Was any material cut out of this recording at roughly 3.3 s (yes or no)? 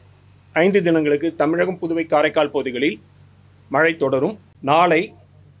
no